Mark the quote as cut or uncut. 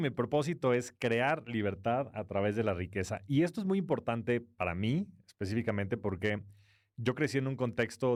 uncut